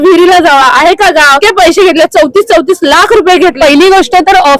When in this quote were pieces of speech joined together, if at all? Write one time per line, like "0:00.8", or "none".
0:01.4
0:03.6